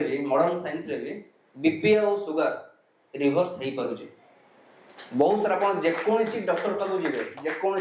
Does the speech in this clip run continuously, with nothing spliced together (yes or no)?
yes